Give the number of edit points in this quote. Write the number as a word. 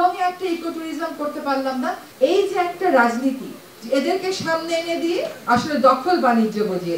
one